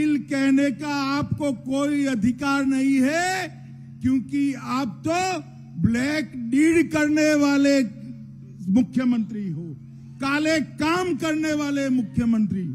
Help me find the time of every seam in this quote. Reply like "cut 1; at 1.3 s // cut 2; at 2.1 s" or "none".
none

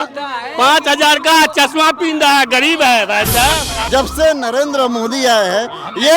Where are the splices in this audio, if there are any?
cut 1; at 3.8 s

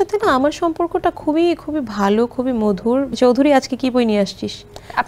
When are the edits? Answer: cut 1; at 3.1 s

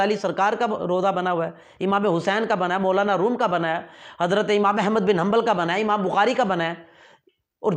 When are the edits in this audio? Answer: none

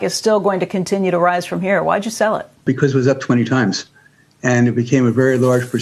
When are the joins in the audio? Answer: cut 1; at 2.6 s

